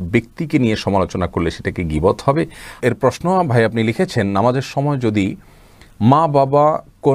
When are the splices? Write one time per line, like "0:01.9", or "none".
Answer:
0:02.7